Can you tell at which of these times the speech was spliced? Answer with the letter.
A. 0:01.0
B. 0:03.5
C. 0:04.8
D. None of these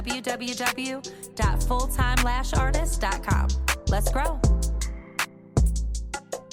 D